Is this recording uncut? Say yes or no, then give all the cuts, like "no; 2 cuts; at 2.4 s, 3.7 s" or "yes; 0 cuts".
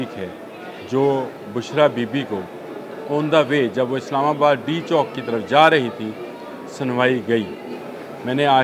yes; 0 cuts